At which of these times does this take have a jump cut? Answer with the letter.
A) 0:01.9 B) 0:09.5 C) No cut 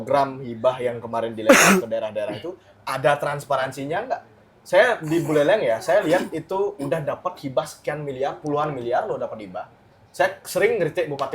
C